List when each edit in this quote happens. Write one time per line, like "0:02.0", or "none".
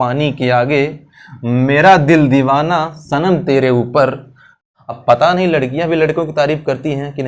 0:04.7